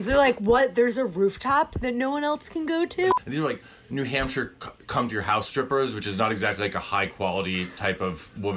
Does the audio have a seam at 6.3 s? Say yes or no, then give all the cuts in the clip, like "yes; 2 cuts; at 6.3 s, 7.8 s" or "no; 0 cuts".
no; 1 cut; at 3.1 s